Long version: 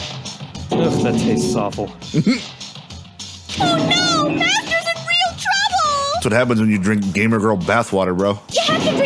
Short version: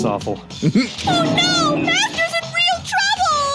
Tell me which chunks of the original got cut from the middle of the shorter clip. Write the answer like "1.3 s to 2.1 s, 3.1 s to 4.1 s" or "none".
2.5 s to 3.5 s